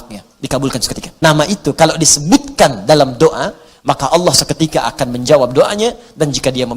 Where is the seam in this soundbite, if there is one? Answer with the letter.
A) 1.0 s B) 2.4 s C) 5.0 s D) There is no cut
A